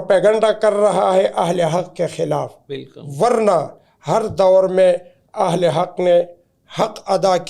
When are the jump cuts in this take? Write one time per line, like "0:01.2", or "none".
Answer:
none